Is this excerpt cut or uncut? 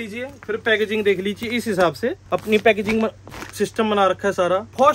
uncut